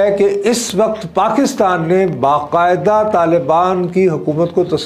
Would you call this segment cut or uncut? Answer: uncut